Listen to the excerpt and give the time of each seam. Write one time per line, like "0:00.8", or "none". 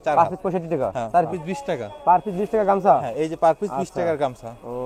0:01.3